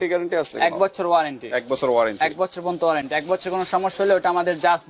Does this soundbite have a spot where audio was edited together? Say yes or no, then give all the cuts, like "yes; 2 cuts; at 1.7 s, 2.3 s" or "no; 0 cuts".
no; 0 cuts